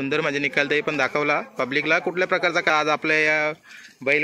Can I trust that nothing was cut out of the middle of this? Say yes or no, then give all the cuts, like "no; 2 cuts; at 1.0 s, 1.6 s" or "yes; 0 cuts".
no; 1 cut; at 2.7 s